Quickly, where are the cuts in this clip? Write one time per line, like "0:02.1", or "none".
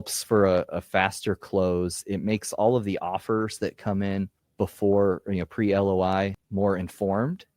0:04.4
0:06.4